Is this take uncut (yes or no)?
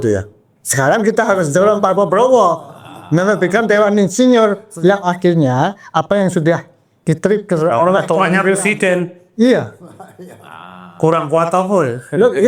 yes